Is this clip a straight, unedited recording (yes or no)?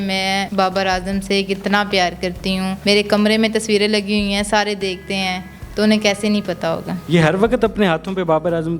yes